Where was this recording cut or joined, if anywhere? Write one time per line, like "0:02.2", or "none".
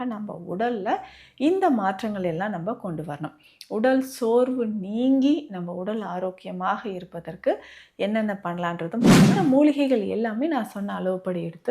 0:09.3